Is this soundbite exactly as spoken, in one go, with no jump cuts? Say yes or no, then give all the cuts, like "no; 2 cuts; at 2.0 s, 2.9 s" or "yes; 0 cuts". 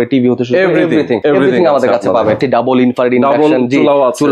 no; 2 cuts; at 1.2 s, 2.4 s